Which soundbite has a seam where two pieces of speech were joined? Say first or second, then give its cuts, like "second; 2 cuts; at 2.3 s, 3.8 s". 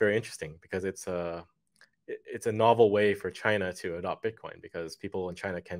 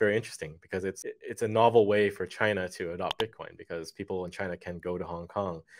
second; 1 cut; at 1.0 s